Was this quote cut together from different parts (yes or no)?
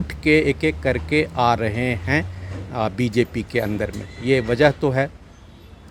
no